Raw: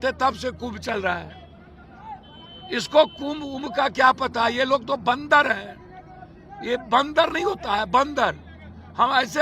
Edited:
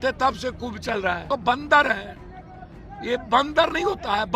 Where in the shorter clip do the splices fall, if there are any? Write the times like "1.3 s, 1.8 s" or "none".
1.2 s